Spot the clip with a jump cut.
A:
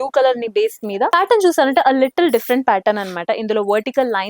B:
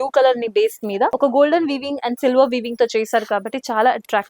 A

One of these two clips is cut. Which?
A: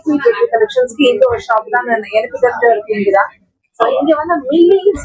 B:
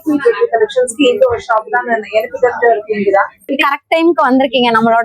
B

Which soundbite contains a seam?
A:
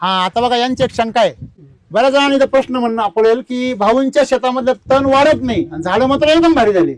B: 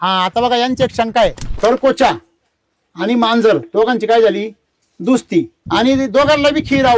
B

